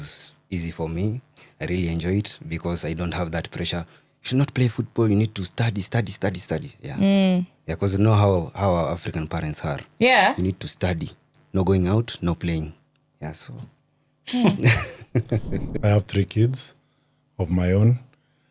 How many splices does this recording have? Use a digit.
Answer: 1